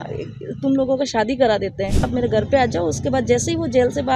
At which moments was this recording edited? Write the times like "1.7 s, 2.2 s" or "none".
2.1 s